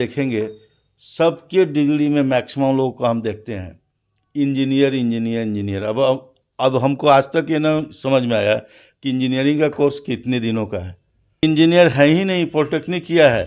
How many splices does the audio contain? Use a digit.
1